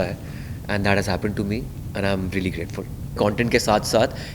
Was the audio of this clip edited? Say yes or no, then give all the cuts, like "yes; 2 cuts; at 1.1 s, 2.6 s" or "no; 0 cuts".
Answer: yes; 1 cut; at 3.2 s